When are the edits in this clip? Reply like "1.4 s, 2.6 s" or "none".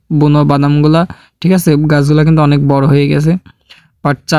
none